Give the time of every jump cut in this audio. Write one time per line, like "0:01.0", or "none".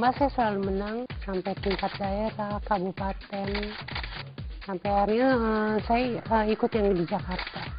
0:01.2